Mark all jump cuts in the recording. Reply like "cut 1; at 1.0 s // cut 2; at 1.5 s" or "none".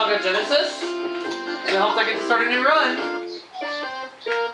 cut 1; at 0.9 s